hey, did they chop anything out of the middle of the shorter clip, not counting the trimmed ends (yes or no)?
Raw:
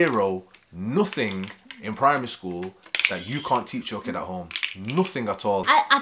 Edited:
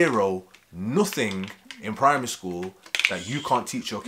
no